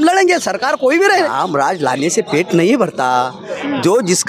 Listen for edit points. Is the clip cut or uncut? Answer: cut